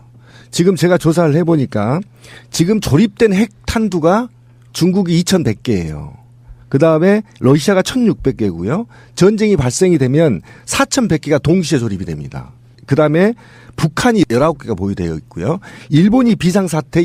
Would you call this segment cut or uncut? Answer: cut